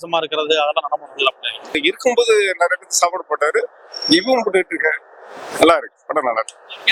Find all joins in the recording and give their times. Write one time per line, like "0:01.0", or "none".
0:01.8